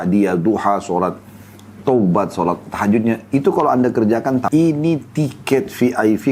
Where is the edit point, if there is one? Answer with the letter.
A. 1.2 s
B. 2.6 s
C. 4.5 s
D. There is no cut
C